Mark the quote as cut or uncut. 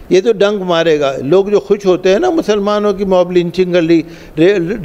uncut